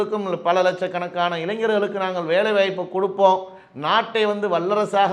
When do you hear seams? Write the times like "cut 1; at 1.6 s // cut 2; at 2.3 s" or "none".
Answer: none

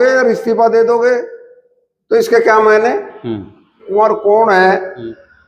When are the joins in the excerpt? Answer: cut 1; at 3.8 s

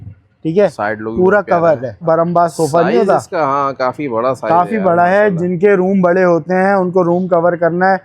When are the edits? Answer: cut 1; at 2.0 s

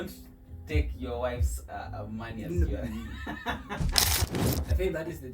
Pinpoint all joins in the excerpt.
cut 1; at 4.4 s

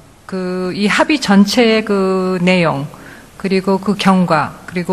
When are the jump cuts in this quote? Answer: cut 1; at 3.8 s

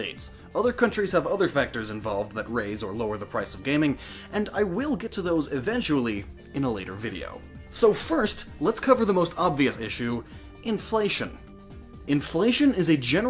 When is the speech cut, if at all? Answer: cut 1; at 7.0 s

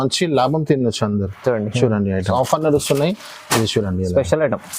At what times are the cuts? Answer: cut 1; at 2.3 s

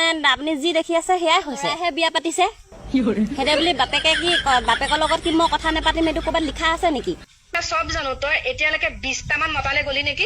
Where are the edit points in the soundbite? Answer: cut 1; at 1.8 s // cut 2; at 7.5 s

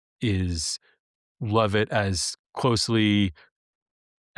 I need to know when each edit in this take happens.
none

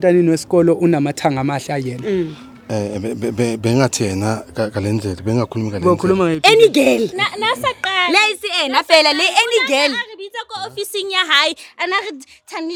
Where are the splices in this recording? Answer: none

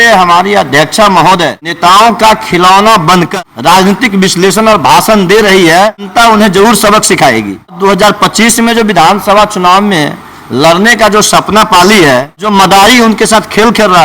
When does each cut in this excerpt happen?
cut 1; at 1.7 s // cut 2; at 3.3 s // cut 3; at 6.1 s // cut 4; at 7.8 s // cut 5; at 12.4 s

